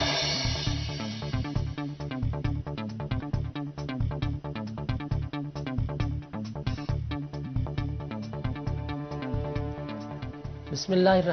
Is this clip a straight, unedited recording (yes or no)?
yes